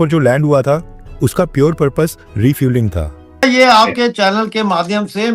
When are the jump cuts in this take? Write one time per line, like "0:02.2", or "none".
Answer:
0:03.4